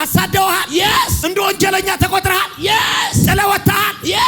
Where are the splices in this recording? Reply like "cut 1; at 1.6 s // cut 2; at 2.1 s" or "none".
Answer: cut 1; at 1.2 s